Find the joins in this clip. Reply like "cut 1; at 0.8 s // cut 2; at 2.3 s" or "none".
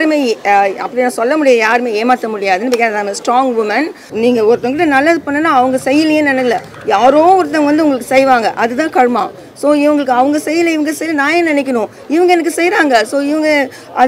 cut 1; at 4.0 s